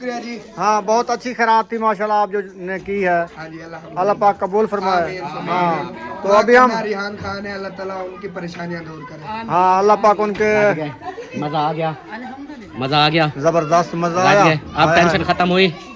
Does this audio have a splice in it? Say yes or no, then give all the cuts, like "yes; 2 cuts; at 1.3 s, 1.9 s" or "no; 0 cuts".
no; 0 cuts